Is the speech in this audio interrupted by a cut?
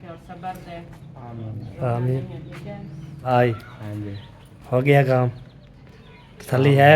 yes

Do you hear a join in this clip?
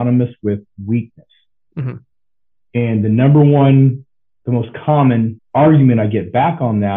yes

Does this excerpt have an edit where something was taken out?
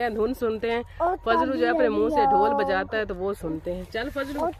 no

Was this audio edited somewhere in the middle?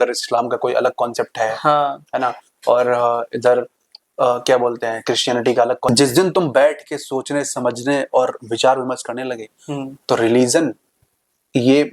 yes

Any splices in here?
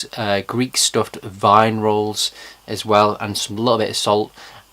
yes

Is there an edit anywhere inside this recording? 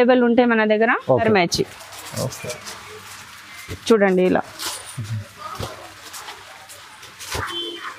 yes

